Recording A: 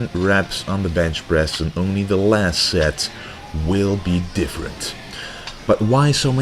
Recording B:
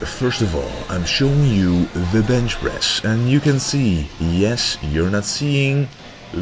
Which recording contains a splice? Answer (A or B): A